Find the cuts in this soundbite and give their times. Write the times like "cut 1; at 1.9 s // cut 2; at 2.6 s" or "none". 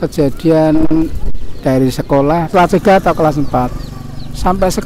cut 1; at 2.5 s